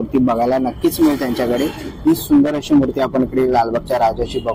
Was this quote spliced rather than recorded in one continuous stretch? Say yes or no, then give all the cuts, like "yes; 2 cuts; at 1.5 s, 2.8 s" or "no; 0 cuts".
no; 0 cuts